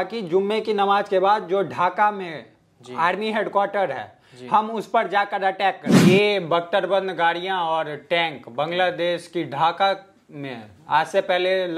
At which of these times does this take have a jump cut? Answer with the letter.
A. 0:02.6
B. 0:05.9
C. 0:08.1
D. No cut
B